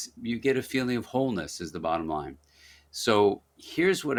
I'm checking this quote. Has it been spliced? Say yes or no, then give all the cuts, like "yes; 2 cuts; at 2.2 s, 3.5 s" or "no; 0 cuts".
no; 0 cuts